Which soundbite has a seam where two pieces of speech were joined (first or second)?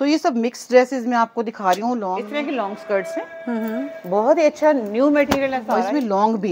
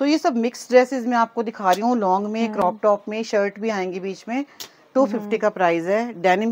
first